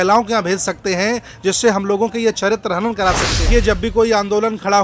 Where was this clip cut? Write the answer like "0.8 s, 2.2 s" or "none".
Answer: 3.3 s